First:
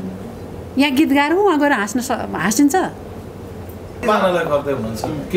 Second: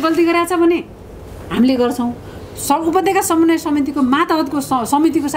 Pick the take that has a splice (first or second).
first